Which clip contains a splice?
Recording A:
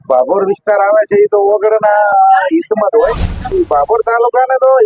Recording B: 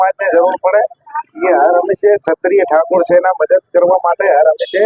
A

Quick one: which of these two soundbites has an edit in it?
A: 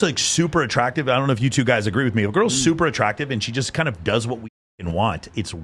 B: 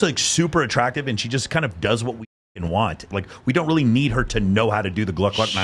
B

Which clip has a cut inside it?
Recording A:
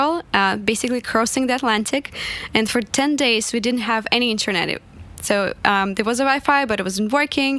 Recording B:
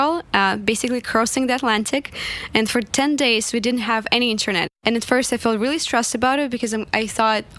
B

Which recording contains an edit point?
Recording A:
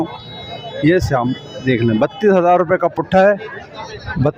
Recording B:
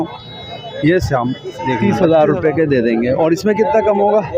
B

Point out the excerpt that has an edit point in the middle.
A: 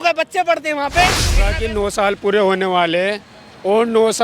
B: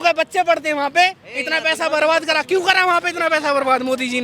A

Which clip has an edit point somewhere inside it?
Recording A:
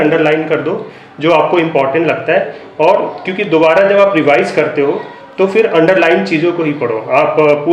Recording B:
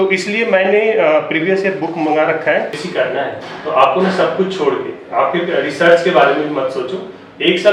B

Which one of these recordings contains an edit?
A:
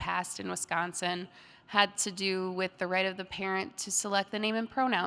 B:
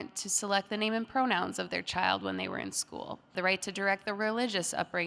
B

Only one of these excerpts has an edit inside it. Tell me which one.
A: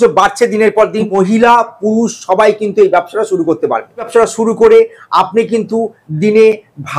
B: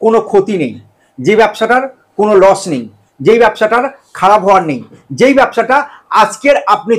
A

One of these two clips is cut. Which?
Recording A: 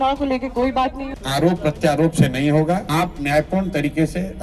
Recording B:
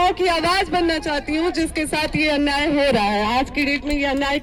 A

